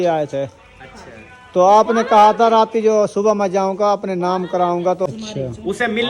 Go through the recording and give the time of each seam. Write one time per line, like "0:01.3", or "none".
0:05.1